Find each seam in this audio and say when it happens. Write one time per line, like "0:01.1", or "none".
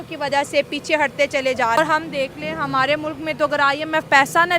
0:01.8

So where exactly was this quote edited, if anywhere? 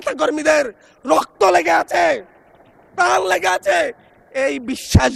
none

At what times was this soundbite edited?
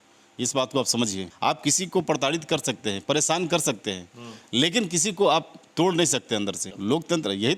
0:01.2
0:06.7

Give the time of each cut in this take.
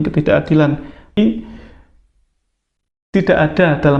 0:01.2

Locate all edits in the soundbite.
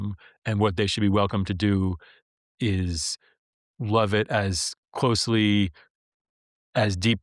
none

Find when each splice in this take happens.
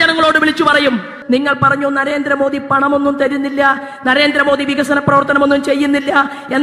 0:01.1

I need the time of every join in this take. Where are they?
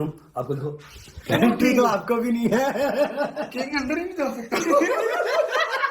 0:04.9

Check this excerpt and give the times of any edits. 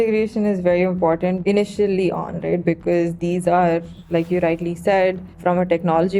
0:01.4
0:03.9
0:05.3

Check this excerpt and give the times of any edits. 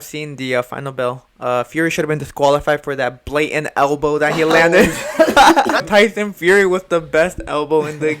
0:05.9

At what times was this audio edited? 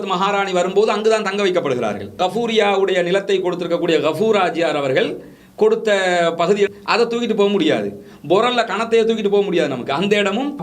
0:02.1
0:06.7

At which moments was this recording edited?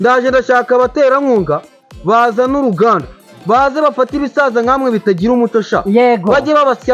none

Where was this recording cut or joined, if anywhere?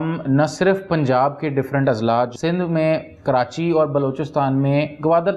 0:02.3

